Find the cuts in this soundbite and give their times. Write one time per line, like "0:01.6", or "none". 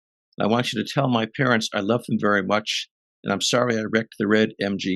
none